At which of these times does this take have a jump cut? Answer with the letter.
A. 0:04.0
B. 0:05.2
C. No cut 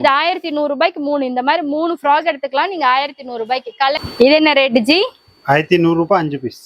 A